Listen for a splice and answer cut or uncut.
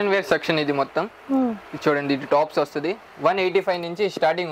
uncut